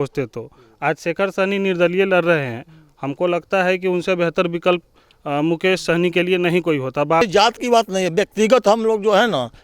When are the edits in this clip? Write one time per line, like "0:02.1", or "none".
0:07.2